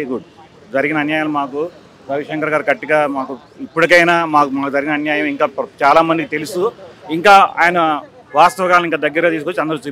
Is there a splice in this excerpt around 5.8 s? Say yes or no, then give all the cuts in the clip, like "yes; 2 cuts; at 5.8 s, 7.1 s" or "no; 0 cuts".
no; 0 cuts